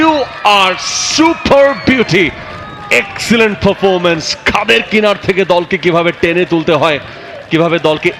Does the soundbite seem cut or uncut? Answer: uncut